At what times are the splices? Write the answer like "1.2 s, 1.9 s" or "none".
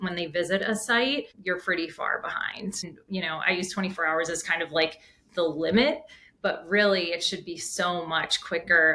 1.3 s, 2.9 s

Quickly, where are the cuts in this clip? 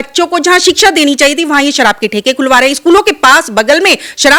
none

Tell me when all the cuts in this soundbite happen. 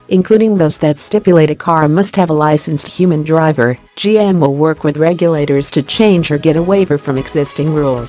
none

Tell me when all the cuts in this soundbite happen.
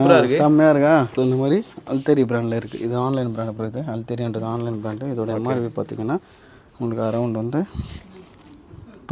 1.1 s

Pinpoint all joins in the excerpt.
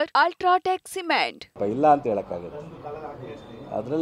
1.4 s

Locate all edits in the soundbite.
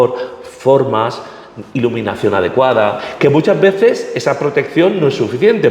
3.0 s

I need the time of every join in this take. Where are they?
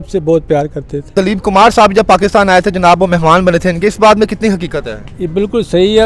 1.1 s

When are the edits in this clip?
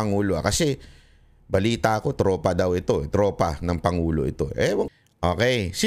4.9 s

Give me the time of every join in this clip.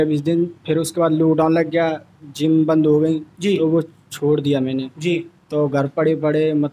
none

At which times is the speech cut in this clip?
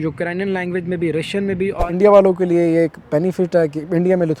1.8 s

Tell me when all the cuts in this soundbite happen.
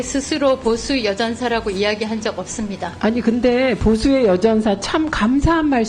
2.9 s

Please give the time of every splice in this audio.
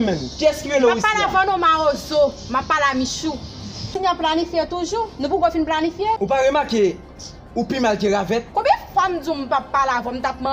3.9 s, 6.2 s

